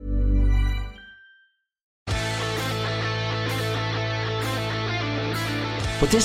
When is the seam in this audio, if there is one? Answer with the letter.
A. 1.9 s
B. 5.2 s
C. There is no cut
A